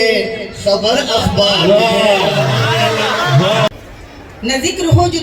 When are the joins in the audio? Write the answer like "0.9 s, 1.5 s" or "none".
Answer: 3.7 s